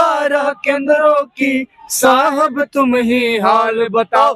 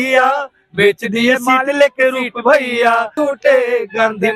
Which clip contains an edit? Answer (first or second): second